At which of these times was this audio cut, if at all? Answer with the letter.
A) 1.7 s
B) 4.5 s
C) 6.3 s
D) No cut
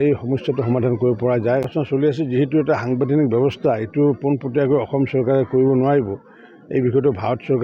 A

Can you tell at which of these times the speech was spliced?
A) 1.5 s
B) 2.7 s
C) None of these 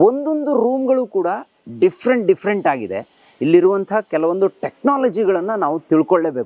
C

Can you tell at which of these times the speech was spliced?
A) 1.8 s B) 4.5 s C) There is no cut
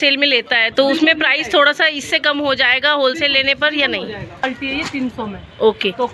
B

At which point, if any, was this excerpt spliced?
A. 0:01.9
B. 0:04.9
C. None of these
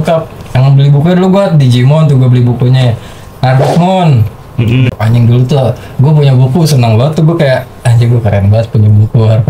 B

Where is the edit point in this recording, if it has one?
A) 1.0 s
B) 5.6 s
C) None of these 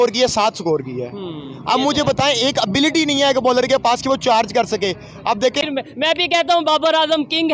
B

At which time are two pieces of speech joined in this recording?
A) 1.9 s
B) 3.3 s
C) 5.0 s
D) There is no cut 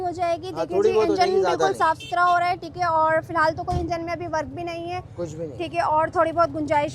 D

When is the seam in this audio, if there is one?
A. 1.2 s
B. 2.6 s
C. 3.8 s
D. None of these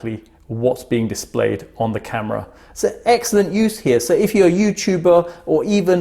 D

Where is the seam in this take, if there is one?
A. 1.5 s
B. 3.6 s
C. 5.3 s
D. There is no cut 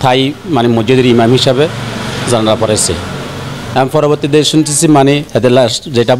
C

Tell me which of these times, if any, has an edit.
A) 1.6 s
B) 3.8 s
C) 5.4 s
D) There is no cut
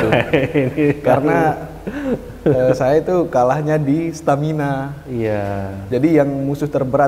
D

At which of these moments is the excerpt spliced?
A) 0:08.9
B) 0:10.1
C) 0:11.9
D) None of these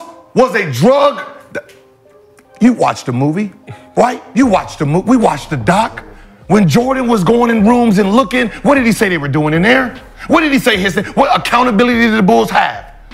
D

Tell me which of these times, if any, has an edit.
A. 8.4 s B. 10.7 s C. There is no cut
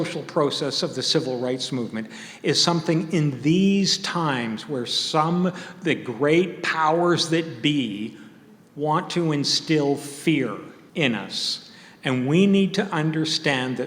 B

